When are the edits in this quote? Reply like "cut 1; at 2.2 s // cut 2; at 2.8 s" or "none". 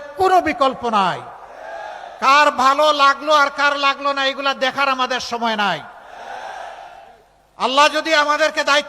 cut 1; at 5.5 s